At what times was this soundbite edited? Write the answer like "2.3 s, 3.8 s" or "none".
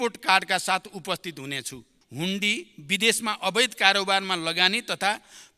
1.9 s